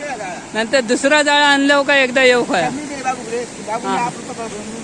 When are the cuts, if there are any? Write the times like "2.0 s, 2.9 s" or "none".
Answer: none